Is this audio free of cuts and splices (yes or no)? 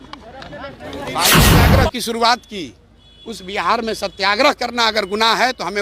no